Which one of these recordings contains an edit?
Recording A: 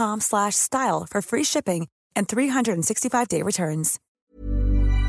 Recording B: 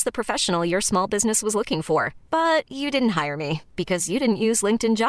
A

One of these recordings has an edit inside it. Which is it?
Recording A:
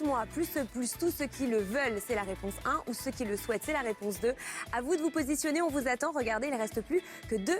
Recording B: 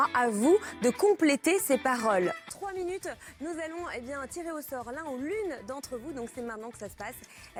A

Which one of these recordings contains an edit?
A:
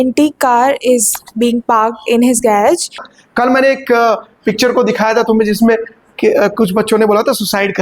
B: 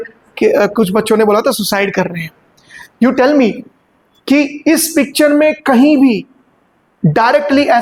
A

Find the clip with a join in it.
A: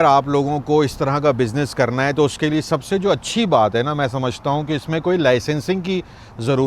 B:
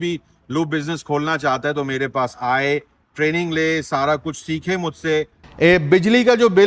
B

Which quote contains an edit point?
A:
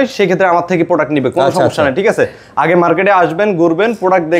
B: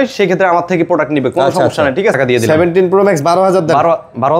B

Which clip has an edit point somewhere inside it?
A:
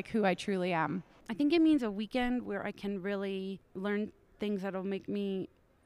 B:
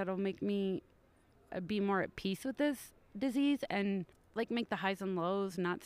A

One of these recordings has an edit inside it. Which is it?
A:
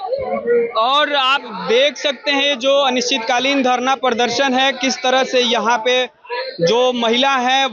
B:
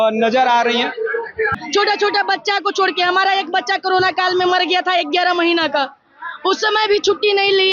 B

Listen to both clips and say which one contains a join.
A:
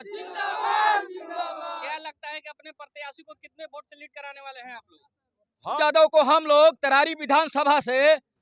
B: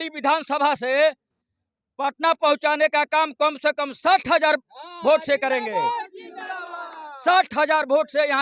A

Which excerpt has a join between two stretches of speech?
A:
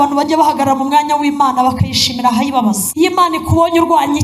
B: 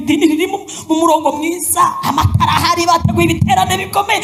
A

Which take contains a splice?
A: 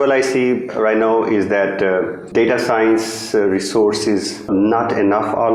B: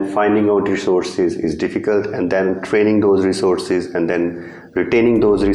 A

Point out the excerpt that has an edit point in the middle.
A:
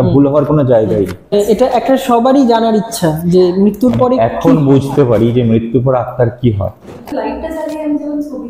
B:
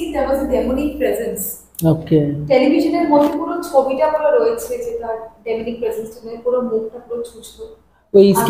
A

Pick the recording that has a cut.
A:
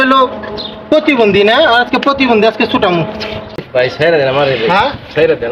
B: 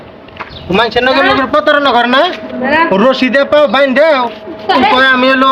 A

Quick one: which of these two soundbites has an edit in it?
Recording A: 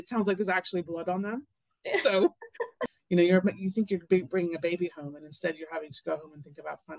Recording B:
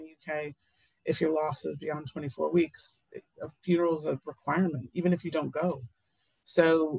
A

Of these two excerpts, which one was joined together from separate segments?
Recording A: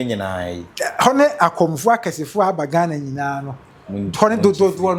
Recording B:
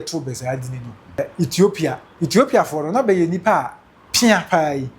B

